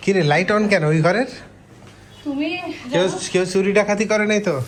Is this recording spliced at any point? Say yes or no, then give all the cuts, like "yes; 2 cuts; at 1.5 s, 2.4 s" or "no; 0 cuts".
no; 0 cuts